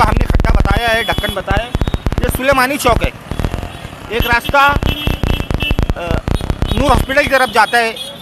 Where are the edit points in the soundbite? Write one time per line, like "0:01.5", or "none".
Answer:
none